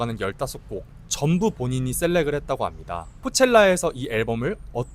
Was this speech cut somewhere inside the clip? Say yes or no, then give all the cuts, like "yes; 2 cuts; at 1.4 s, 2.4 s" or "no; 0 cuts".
yes; 1 cut; at 3.2 s